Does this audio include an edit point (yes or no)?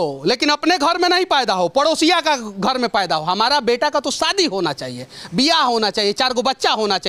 no